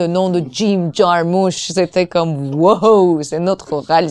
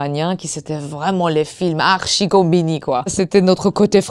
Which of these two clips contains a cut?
second; 1 cut; at 3.1 s

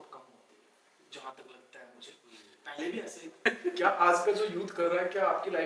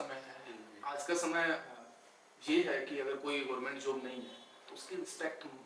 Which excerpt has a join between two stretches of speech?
first; 1 cut; at 3.3 s

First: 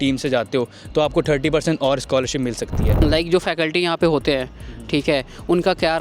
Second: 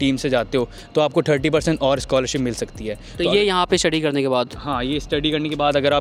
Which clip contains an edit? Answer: first; 1 cut; at 2.9 s

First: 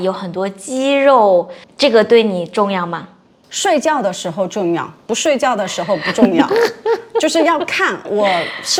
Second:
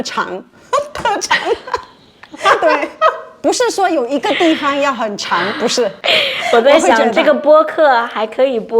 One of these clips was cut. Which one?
second; 2 cuts; at 3.3 s, 6.0 s

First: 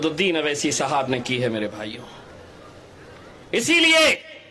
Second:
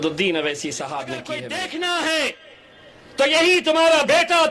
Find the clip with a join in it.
second; 1 cut; at 1.3 s

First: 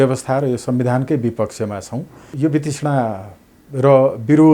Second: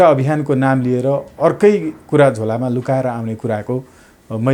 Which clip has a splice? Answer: first; 1 cut; at 2.3 s

